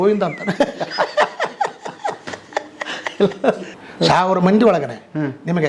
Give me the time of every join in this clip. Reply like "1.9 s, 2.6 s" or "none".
3.7 s